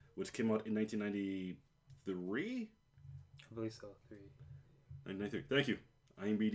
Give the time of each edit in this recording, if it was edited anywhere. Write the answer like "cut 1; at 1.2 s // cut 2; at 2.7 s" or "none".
cut 1; at 1.4 s